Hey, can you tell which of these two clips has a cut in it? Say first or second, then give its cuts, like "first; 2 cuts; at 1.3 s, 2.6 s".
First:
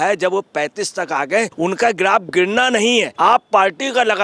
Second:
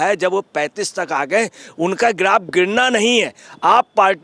first; 2 cuts; at 1.5 s, 3.1 s